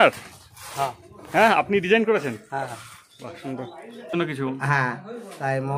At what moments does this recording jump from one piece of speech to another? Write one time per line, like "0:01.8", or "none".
0:04.1